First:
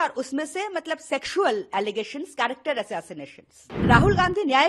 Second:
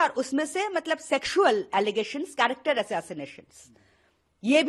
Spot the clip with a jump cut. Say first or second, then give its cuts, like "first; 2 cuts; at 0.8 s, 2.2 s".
first; 1 cut; at 3.7 s